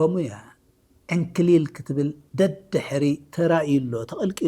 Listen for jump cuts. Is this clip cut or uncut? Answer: uncut